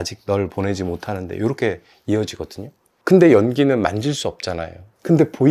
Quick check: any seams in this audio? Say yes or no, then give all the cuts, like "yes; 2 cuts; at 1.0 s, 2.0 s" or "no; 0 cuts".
no; 0 cuts